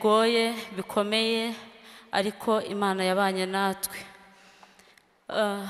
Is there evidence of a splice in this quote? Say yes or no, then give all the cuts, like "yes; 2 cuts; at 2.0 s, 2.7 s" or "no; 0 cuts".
no; 0 cuts